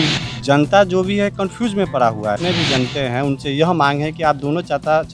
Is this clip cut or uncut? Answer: cut